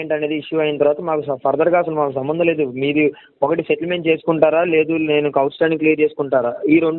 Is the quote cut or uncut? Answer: uncut